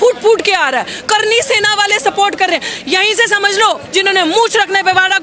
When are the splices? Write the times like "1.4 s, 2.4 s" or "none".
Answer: 3.8 s